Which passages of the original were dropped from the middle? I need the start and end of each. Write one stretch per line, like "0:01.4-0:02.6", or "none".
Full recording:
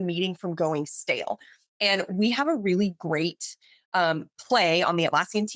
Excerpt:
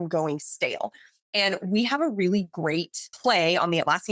0:03.5-0:04.3